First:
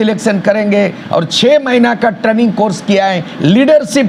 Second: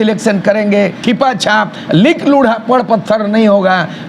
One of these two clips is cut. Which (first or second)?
second